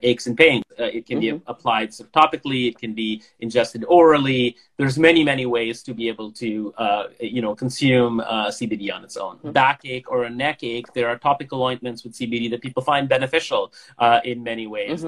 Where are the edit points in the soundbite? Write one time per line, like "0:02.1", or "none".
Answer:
none